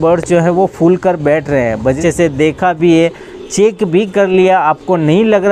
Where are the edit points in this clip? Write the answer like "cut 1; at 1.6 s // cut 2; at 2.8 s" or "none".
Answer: cut 1; at 2.0 s